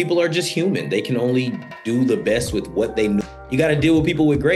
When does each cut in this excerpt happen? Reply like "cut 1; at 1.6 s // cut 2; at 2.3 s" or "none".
cut 1; at 3.2 s